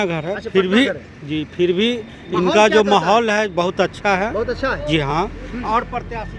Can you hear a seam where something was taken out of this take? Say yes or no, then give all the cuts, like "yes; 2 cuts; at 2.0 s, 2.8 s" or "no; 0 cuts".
no; 0 cuts